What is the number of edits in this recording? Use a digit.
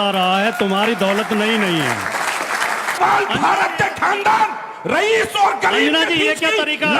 1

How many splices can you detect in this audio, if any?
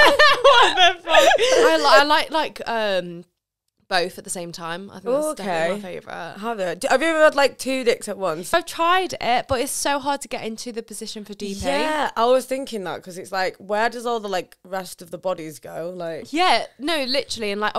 2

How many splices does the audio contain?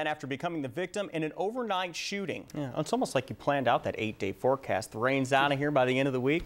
1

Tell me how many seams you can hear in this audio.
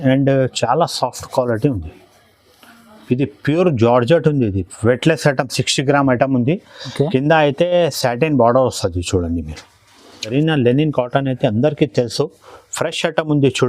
1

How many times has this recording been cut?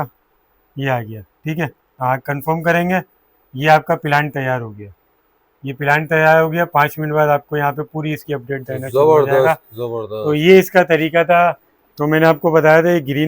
2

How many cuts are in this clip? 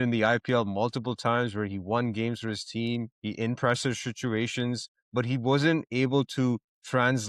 1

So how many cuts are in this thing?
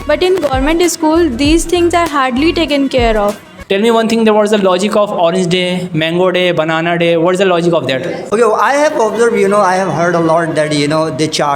2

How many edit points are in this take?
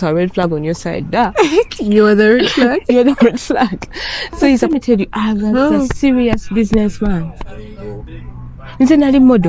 1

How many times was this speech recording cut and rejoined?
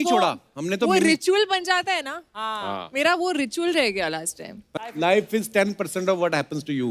1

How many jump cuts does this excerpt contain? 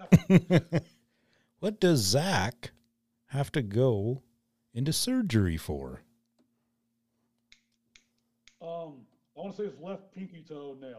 0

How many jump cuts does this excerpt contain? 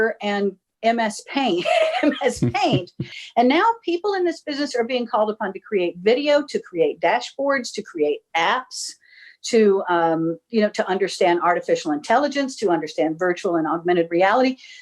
1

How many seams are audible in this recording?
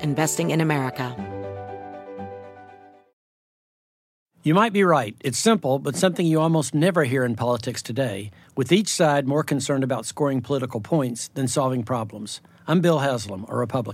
1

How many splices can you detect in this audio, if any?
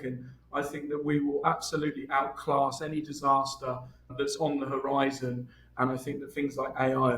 1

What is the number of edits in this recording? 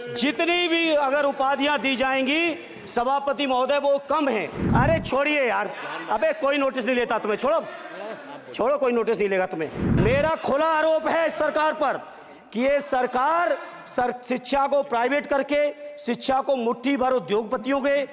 2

